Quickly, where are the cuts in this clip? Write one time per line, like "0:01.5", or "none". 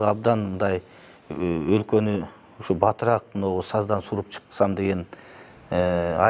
none